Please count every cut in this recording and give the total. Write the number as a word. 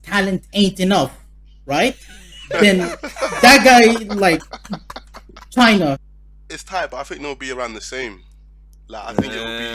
one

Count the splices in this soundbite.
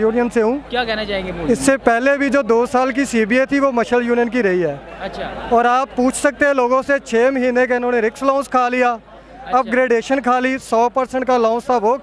zero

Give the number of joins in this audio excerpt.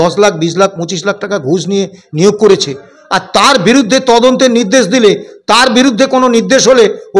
zero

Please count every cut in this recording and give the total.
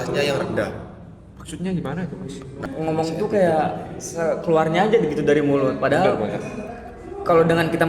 one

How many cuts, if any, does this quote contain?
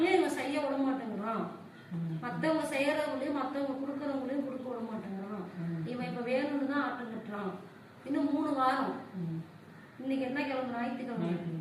zero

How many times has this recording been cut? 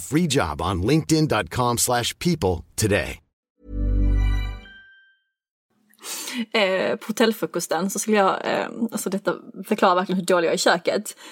one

